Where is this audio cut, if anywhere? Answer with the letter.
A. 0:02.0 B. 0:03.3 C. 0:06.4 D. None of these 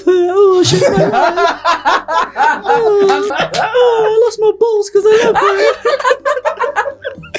B